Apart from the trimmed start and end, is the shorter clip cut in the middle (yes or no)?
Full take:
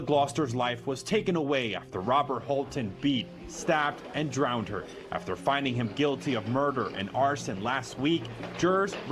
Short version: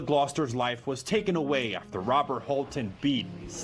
no